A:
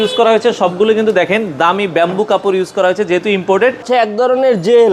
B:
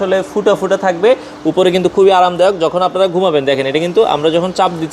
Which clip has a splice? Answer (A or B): A